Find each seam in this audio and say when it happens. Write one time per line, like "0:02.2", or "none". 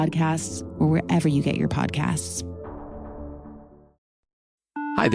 0:03.8